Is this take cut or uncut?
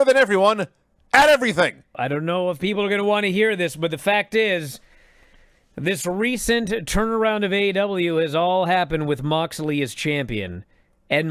cut